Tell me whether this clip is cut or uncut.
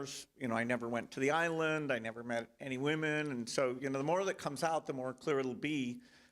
cut